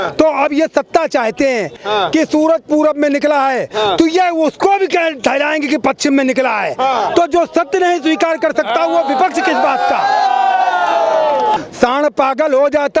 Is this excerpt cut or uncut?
cut